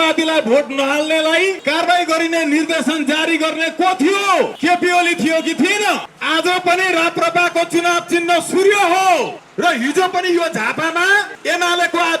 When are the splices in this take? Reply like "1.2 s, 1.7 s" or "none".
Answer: 1.6 s, 4.5 s, 6.1 s, 9.4 s, 11.3 s